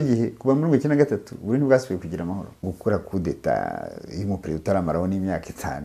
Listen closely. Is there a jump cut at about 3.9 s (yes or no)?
no